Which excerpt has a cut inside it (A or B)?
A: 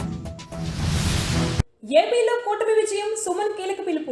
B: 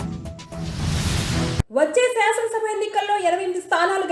B